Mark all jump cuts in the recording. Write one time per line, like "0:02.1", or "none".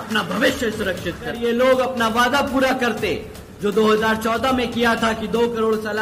0:01.3